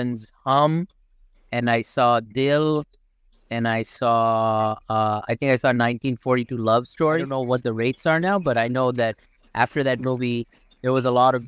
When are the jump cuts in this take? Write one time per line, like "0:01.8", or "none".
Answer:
0:07.3